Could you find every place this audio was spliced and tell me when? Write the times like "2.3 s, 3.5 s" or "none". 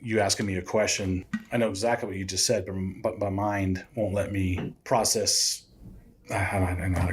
1.2 s, 4.8 s